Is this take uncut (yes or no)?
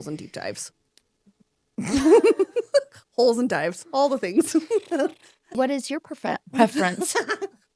no